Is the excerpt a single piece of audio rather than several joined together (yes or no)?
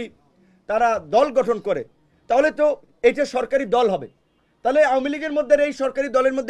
yes